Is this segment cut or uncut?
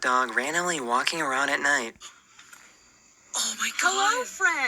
cut